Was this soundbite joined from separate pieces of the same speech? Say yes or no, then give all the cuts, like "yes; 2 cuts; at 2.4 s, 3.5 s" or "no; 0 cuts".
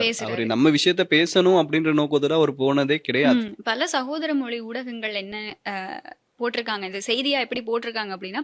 no; 0 cuts